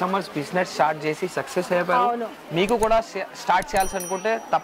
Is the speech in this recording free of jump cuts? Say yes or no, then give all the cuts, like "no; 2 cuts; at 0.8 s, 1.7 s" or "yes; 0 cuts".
yes; 0 cuts